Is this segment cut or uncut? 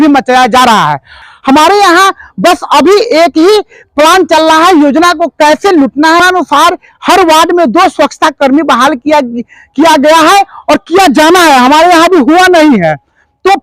cut